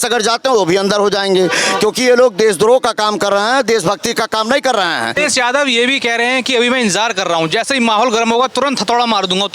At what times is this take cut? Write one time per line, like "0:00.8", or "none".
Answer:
0:05.2

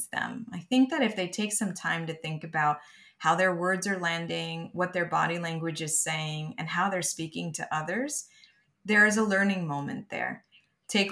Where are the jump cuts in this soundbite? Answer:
none

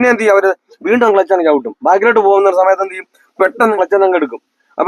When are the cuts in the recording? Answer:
0:03.7

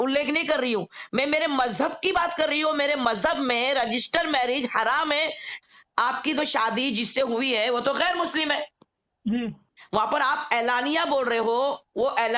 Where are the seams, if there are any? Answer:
0:05.6

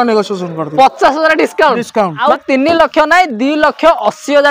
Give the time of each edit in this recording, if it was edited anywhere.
0:02.2

